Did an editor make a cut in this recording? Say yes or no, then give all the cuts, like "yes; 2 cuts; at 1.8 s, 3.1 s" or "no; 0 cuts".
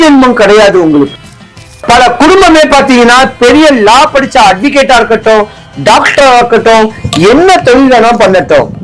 yes; 1 cut; at 1.2 s